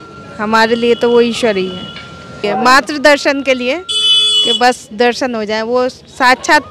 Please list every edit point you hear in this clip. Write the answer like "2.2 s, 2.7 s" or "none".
2.5 s